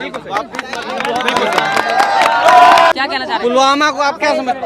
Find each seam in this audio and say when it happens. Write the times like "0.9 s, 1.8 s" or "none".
2.9 s